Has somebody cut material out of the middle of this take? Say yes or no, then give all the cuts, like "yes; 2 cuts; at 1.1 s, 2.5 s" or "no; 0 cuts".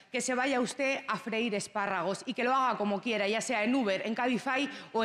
no; 0 cuts